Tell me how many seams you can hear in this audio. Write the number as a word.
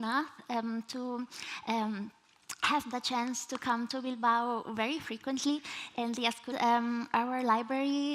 zero